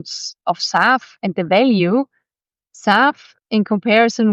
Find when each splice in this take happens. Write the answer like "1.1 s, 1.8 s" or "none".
none